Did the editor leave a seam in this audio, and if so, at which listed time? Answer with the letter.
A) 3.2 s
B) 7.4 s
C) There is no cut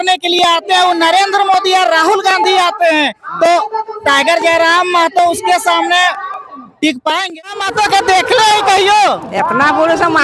B